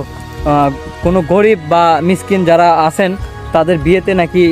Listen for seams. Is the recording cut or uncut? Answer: uncut